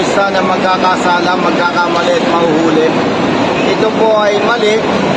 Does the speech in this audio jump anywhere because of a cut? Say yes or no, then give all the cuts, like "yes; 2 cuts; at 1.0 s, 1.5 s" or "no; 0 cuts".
no; 0 cuts